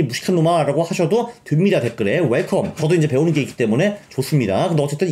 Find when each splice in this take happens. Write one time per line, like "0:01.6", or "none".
0:02.8